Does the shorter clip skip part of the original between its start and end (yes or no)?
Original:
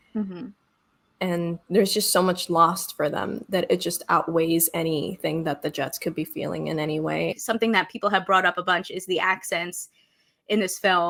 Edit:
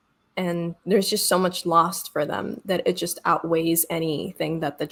no